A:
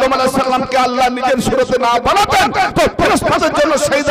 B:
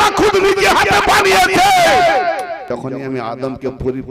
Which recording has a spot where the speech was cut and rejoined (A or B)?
B